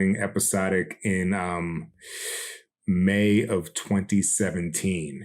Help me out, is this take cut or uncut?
cut